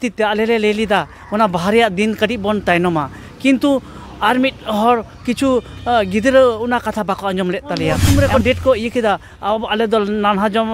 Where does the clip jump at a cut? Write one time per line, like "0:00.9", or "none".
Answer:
0:08.0